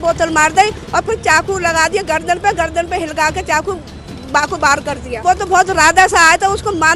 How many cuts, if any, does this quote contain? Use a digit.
1